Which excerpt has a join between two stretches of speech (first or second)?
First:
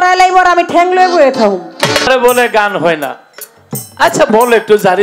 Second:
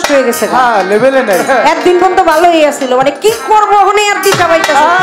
first